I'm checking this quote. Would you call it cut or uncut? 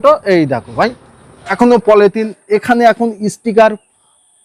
cut